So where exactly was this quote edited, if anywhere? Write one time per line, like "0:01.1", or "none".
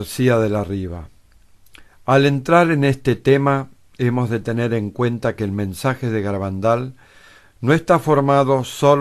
0:02.6